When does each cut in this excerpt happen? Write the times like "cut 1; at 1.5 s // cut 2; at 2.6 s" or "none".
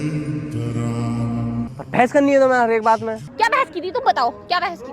cut 1; at 1.7 s // cut 2; at 3.2 s